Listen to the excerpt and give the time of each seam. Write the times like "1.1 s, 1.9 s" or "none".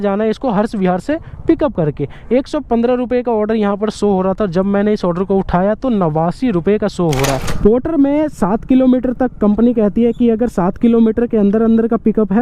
7.5 s